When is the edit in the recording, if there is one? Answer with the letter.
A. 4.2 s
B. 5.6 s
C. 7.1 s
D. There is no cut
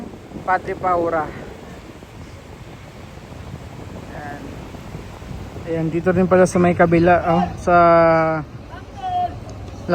B